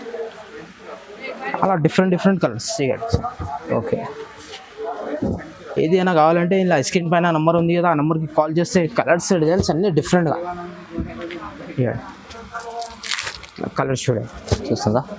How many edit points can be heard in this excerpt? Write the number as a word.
one